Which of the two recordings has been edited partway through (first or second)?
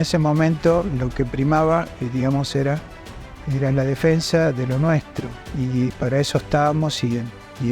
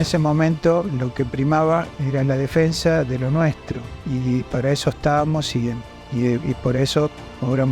second